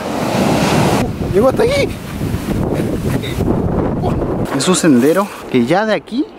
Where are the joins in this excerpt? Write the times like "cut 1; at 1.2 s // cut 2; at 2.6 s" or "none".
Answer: cut 1; at 1.0 s // cut 2; at 4.4 s